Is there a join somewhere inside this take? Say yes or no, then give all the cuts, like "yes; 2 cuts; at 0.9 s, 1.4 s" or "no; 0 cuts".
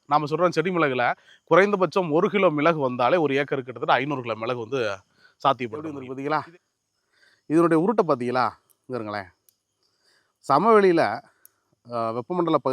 yes; 1 cut; at 6.0 s